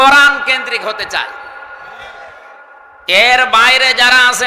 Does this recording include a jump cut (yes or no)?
no